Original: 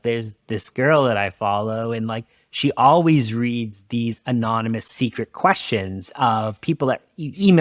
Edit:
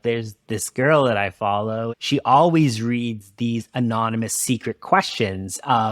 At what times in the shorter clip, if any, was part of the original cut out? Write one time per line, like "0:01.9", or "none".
0:01.9